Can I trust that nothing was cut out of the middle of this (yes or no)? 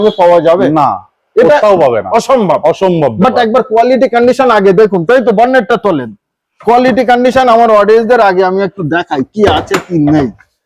yes